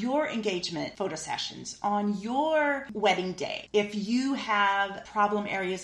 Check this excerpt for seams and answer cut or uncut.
cut